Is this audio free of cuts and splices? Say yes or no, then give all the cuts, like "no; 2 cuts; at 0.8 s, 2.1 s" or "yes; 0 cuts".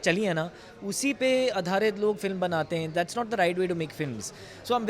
yes; 0 cuts